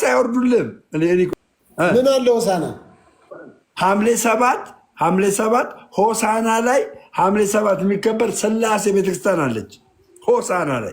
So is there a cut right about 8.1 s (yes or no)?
no